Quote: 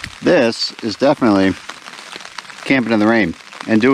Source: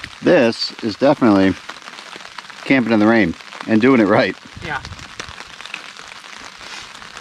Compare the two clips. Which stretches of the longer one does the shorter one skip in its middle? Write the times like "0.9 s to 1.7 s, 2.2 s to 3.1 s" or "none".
none